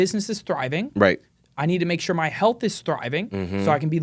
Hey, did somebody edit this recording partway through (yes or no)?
no